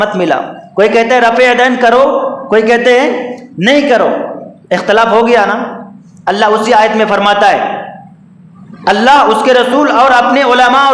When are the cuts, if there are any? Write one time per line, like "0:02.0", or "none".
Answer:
none